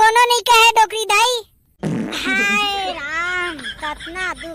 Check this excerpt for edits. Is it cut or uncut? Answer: uncut